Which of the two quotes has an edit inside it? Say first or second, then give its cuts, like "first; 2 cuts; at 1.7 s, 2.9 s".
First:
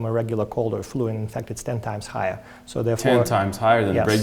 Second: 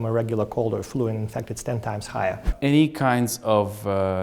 second; 1 cut; at 2.5 s